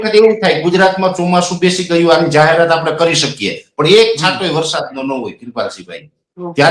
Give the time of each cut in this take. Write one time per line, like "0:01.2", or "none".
none